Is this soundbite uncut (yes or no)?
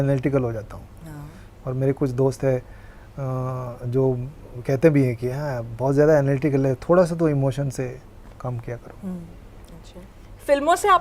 yes